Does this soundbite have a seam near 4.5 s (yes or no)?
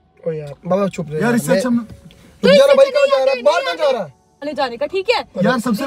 yes